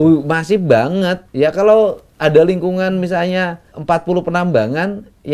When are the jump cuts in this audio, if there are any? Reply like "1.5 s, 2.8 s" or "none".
1.2 s, 3.7 s